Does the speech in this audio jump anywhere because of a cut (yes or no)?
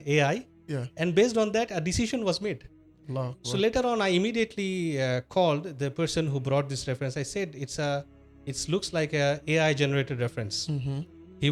no